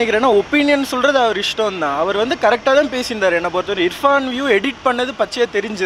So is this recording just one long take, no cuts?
yes; 0 cuts

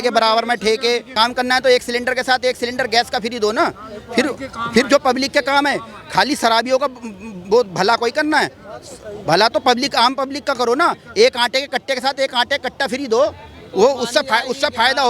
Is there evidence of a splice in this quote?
yes; 1 cut; at 1.1 s

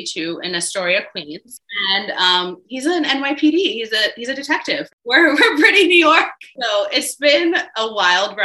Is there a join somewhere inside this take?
yes; 3 cuts; at 1.6 s, 4.9 s, 6.5 s

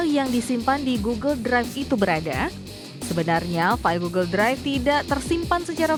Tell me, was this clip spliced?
no; 0 cuts

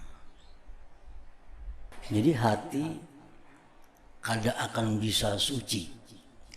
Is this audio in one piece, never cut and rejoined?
no; 1 cut; at 1.9 s

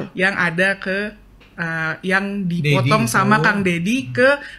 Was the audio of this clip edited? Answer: no; 0 cuts

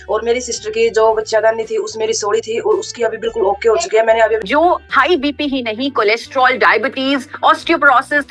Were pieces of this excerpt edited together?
yes; 1 cut; at 4.4 s

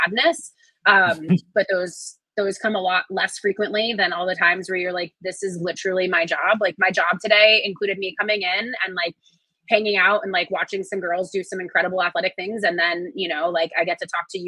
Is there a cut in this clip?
no; 0 cuts

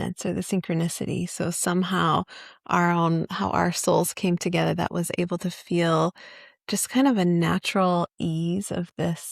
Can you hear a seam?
no; 0 cuts

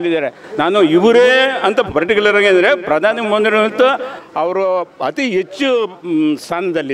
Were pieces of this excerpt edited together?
no; 0 cuts

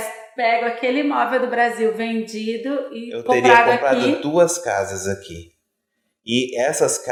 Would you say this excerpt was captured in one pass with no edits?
yes; 0 cuts

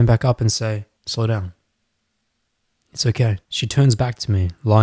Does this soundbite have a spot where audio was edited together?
yes; 2 cuts; at 1.0 s, 3.5 s

